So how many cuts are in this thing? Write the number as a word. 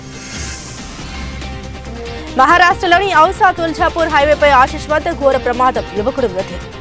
one